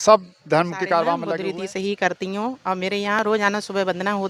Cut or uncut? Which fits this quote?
cut